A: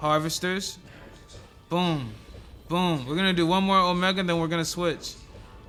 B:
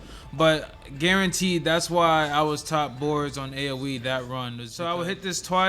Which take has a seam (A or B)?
B